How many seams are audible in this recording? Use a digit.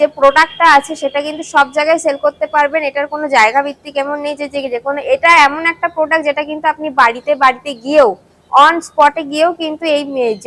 0